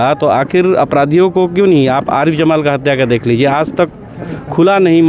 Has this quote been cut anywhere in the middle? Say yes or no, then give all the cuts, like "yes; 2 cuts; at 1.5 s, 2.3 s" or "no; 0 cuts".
no; 0 cuts